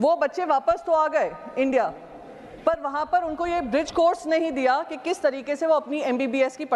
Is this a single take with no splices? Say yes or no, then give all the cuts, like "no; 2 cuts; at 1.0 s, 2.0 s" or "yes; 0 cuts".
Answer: yes; 0 cuts